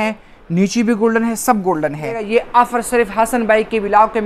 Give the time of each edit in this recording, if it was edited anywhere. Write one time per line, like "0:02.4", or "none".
0:02.2

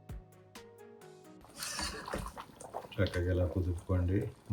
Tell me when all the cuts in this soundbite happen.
none

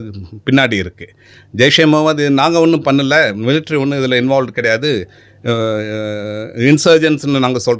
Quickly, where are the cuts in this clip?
none

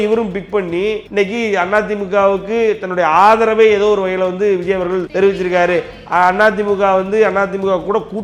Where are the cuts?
0:01.0
0:05.1

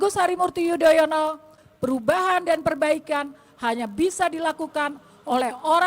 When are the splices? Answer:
0:01.6

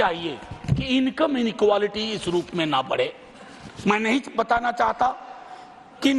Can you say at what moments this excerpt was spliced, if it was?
none

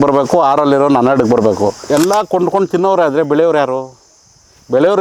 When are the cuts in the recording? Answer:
0:01.8

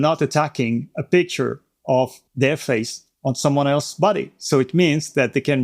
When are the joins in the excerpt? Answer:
0:02.2
0:03.0

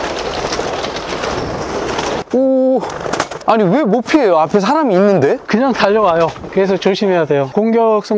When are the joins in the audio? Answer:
0:02.2
0:03.3
0:06.4

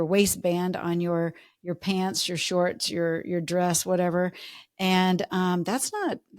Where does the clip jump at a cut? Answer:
none

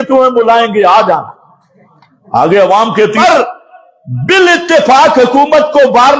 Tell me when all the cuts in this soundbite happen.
0:03.2

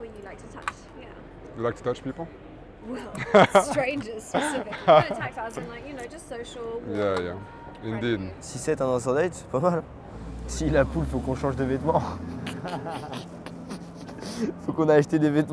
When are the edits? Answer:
none

